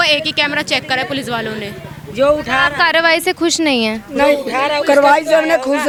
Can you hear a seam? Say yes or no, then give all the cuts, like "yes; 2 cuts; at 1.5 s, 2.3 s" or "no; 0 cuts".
no; 0 cuts